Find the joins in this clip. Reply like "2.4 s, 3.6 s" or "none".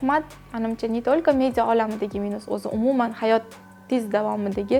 none